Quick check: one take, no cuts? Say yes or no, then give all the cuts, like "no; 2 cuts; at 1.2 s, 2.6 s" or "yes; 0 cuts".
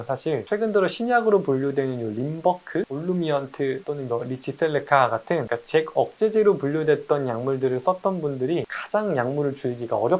yes; 0 cuts